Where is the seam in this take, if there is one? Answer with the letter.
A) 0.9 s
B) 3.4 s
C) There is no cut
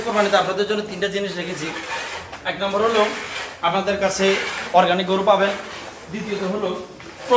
C